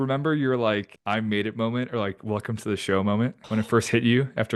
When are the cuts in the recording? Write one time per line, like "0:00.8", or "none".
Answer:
0:00.9
0:03.4

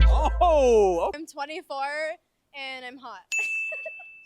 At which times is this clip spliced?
0:01.2

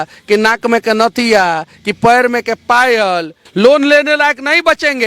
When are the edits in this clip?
0:03.4

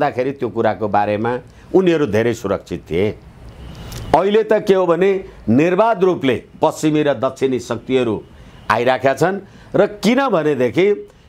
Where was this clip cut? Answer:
none

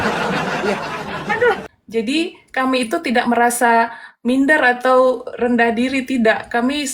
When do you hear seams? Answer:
0:01.7

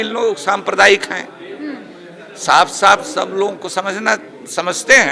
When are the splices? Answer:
none

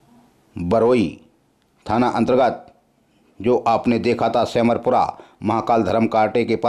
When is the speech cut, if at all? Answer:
none

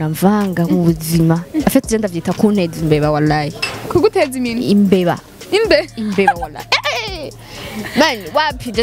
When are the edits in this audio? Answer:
none

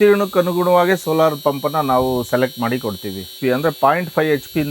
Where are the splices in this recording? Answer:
0:03.3

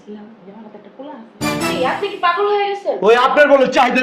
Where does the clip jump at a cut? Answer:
0:01.6

